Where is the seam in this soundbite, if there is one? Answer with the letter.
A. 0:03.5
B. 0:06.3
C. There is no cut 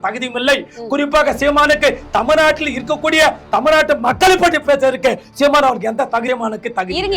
B